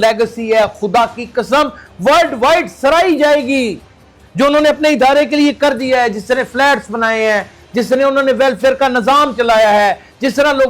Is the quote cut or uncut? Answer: uncut